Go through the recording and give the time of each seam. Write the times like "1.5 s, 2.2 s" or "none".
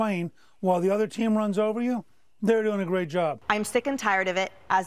3.4 s